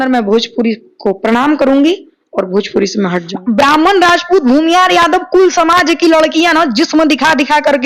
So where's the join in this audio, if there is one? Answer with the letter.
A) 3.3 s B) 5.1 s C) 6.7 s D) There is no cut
A